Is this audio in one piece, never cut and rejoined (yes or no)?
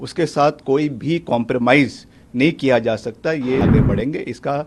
no